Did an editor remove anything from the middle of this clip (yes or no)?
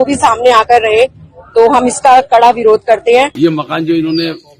yes